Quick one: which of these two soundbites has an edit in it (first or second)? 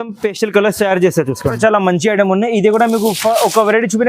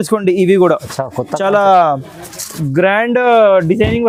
first